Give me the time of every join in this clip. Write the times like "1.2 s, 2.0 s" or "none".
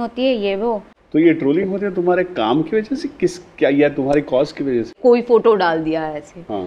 0.9 s, 4.9 s